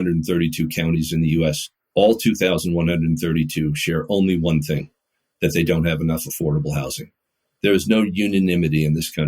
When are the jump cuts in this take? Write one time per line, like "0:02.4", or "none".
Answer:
0:01.7